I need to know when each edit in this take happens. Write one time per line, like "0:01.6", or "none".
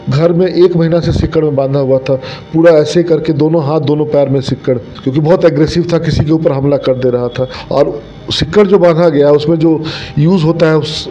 0:04.9
0:07.6